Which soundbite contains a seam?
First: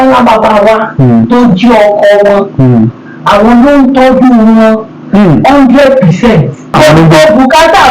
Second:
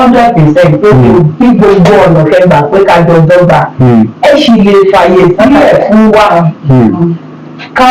first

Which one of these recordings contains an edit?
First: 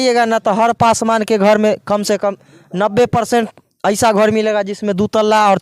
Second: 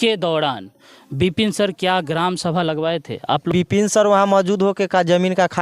second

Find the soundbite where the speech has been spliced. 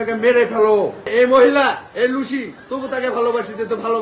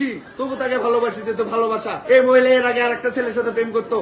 first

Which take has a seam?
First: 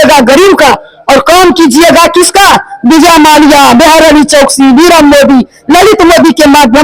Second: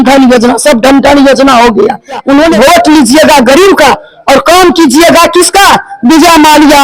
second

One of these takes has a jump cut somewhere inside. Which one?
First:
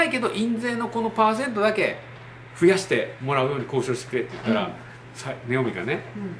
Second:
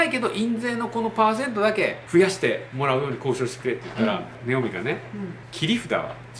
second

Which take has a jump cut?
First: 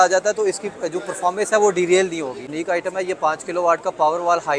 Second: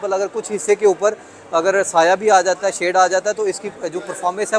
first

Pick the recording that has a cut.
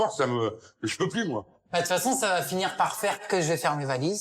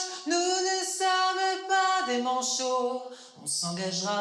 first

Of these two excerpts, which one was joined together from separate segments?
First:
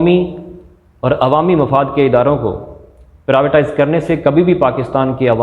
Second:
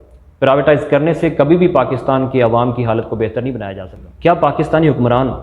second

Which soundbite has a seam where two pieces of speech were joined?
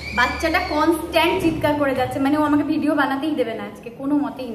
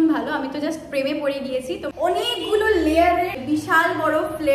second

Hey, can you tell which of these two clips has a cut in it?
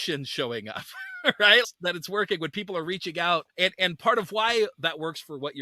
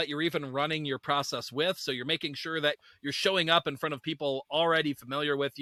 first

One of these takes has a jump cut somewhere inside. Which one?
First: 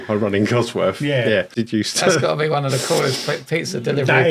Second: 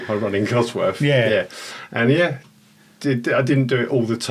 first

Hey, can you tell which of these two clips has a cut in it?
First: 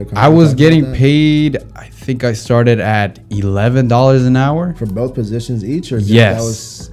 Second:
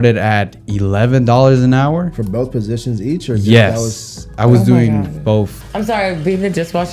second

